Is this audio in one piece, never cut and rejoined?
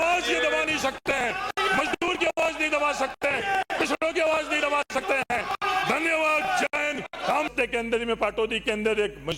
no; 1 cut; at 7.5 s

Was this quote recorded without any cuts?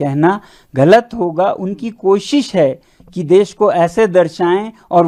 yes; 0 cuts

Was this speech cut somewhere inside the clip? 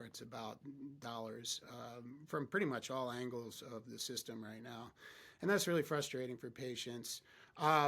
no; 0 cuts

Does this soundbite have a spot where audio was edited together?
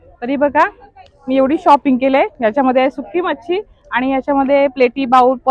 no; 0 cuts

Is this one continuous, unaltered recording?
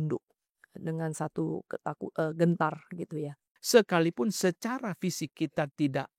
no; 1 cut; at 3.4 s

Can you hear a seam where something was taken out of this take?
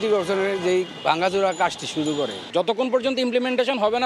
yes; 1 cut; at 2.4 s

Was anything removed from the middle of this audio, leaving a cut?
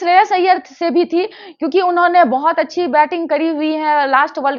no; 0 cuts

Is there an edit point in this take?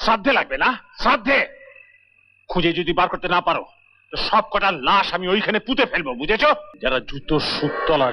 yes; 1 cut; at 6.7 s

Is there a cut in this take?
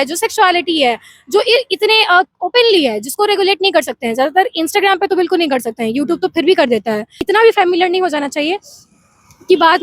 yes; 1 cut; at 7.2 s

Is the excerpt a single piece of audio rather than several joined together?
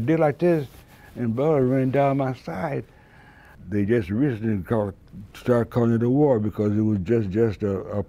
no; 1 cut; at 3.5 s

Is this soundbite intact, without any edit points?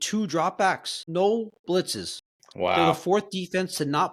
no; 1 cut; at 0.9 s

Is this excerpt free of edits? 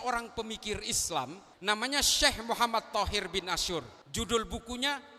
no; 2 cuts; at 1.5 s, 4.0 s

